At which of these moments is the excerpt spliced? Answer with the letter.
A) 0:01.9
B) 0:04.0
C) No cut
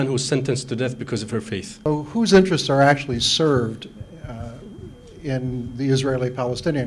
A